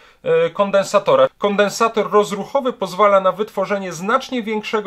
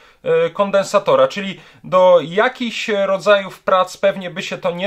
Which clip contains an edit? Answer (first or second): first